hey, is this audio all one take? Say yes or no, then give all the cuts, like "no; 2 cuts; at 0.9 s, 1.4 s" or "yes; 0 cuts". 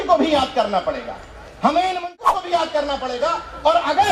no; 1 cut; at 2.1 s